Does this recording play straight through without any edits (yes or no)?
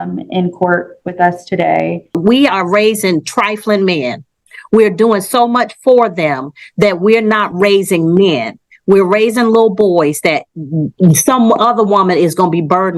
no